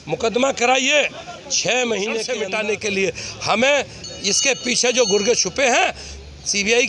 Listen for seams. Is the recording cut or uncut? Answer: cut